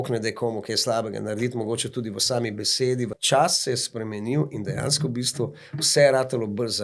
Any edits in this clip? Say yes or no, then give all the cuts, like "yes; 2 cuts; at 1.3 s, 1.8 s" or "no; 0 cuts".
yes; 1 cut; at 3.2 s